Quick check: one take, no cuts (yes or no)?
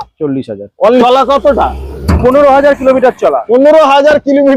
no